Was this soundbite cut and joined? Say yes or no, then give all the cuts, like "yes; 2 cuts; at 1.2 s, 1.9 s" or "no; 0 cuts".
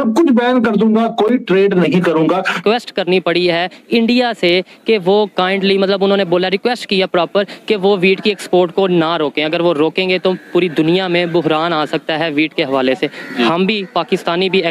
yes; 1 cut; at 2.6 s